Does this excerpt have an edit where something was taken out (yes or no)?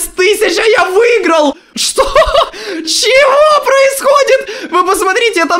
yes